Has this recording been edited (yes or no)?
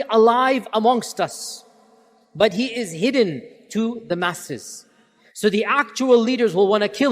yes